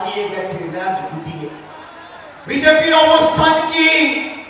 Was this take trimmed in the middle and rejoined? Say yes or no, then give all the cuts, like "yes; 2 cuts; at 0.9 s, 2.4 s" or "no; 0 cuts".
no; 0 cuts